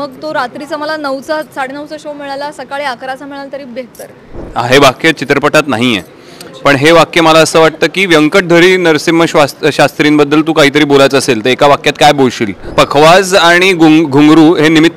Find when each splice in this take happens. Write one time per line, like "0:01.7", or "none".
0:04.4
0:12.6